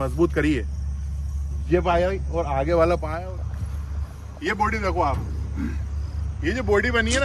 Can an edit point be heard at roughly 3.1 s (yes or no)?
yes